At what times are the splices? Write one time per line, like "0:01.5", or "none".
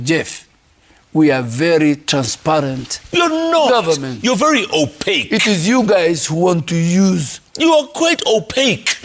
none

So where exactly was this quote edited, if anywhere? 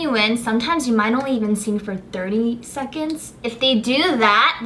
0:03.4

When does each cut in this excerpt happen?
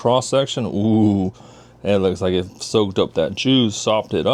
none

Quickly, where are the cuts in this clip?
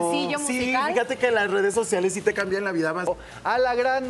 0:03.1

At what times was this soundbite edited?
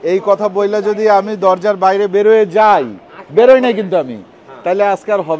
none

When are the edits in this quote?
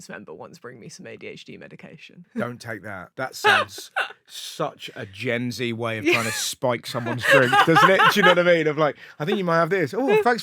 0:02.2
0:03.0

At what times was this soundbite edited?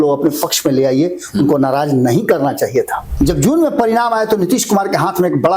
0:03.0

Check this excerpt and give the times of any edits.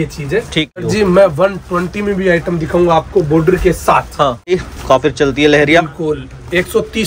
0:00.8
0:04.5

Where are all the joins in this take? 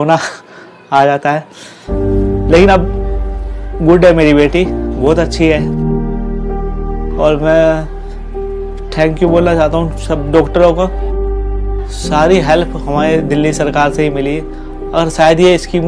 none

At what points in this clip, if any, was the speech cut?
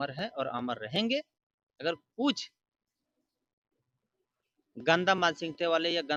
none

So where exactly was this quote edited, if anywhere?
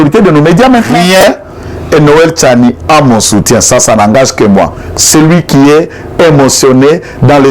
0:01.0

